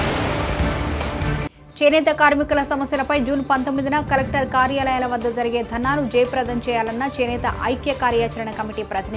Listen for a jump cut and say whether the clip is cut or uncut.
cut